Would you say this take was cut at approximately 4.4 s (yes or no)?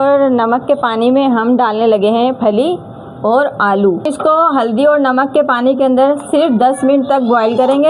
yes